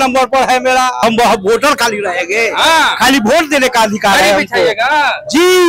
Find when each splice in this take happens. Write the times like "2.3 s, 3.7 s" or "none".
1.0 s

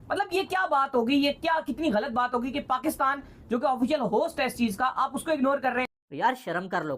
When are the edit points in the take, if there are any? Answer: 6.0 s

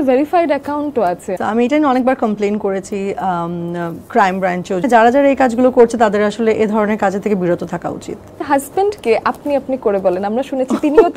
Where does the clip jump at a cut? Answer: 1.3 s, 4.9 s, 8.3 s

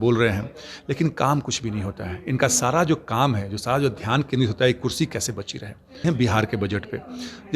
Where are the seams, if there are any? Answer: 6.0 s

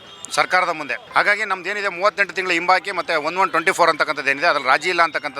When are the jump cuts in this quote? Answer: 1.0 s

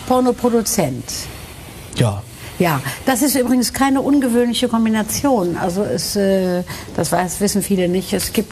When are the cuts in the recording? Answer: none

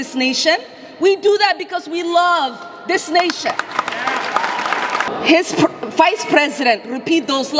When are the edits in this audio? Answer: 5.1 s

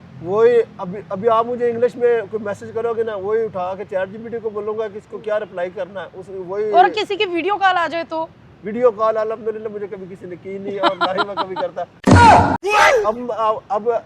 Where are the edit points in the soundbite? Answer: none

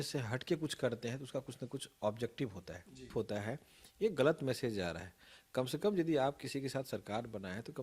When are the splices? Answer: 3.1 s

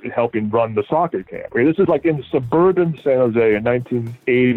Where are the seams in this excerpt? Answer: none

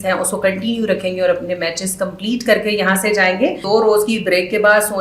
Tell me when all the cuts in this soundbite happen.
3.6 s

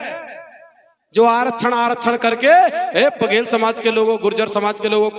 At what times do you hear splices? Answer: none

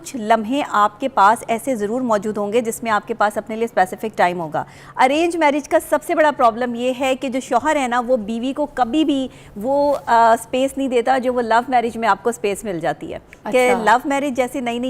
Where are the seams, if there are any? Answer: 4.8 s

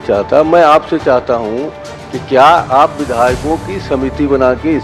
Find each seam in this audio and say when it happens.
none

